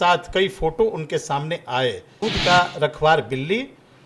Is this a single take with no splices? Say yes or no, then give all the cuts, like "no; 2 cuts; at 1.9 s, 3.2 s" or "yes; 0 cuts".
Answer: no; 1 cut; at 2.2 s